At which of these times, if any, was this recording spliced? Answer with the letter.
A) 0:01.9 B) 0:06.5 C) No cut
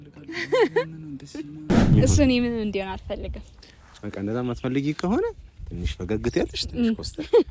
A